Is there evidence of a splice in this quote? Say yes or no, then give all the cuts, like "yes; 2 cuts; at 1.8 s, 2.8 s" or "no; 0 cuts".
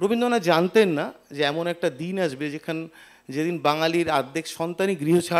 no; 0 cuts